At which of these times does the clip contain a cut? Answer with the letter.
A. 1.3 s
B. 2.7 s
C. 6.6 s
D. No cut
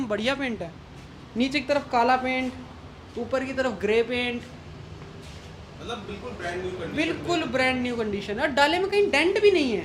D